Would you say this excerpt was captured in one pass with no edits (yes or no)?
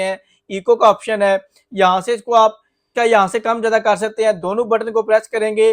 no